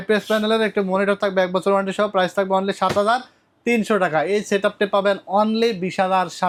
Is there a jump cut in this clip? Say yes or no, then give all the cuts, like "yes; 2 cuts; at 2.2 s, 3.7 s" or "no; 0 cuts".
no; 0 cuts